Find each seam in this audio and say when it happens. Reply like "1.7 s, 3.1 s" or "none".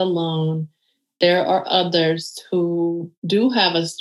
1.1 s, 3.1 s